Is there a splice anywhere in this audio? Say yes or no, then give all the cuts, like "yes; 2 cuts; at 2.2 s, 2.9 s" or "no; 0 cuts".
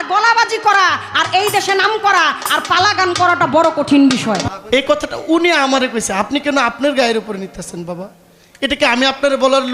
yes; 1 cut; at 4.4 s